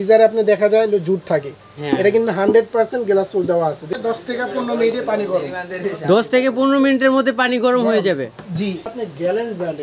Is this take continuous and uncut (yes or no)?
no